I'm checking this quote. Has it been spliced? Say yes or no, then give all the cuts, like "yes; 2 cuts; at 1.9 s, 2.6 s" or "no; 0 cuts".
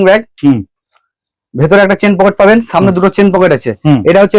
no; 0 cuts